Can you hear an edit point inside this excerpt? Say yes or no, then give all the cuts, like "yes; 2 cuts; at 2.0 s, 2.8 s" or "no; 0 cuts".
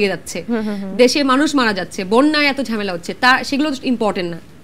no; 0 cuts